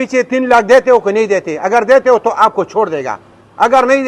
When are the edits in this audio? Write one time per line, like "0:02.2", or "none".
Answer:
none

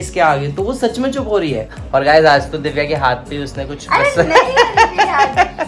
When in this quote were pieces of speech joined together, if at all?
0:01.7

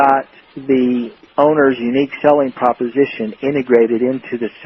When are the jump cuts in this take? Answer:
0:01.2

